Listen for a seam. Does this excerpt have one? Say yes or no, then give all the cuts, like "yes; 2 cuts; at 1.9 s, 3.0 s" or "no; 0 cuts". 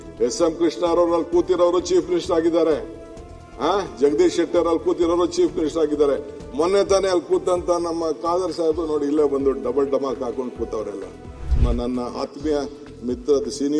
yes; 1 cut; at 11.4 s